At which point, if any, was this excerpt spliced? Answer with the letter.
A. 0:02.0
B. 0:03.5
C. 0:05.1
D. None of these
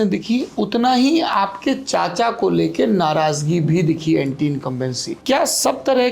C